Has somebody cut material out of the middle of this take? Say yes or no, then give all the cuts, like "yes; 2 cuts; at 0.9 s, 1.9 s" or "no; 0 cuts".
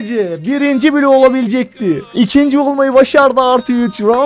yes; 1 cut; at 2.0 s